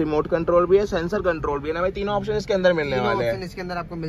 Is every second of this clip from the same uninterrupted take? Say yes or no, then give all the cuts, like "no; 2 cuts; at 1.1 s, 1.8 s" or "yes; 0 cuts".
yes; 0 cuts